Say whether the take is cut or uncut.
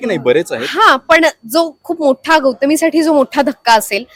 uncut